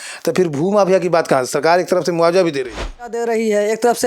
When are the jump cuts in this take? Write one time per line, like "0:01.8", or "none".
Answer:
0:03.2